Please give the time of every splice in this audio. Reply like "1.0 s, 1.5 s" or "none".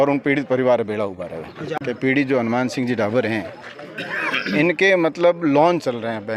1.7 s